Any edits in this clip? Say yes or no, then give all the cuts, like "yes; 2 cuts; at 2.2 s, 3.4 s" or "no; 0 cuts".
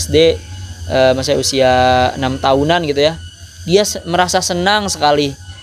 no; 0 cuts